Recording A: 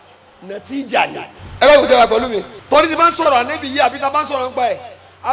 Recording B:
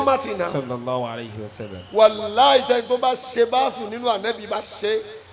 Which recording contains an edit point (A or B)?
A